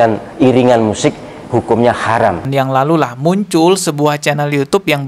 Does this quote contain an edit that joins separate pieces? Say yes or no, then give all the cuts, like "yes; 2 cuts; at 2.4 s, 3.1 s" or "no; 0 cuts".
yes; 1 cut; at 2.5 s